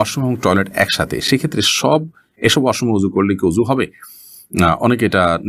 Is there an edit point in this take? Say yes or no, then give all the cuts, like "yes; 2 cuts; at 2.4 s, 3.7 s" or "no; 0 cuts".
no; 0 cuts